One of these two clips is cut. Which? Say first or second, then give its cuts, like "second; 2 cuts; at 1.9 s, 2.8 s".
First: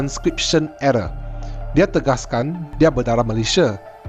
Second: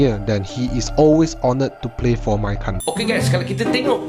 second; 1 cut; at 3.1 s